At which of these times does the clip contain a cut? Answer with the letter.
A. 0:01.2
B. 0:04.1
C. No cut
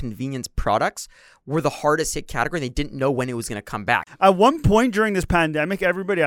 B